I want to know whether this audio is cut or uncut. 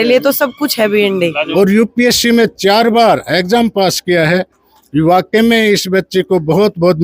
cut